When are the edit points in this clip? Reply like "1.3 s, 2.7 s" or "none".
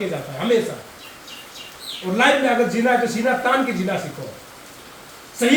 none